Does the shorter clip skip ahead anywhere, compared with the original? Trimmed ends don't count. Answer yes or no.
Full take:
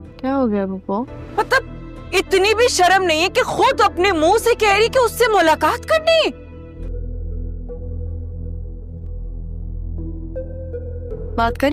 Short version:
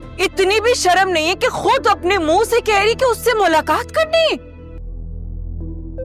yes